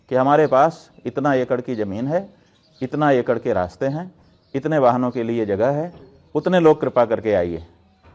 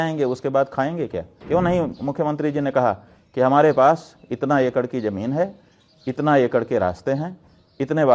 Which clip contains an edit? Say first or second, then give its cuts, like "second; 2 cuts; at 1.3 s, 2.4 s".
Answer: second; 1 cut; at 1.3 s